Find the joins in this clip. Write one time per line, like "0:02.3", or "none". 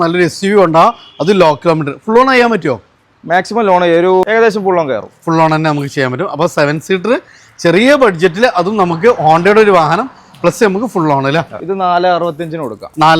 0:04.2
0:11.6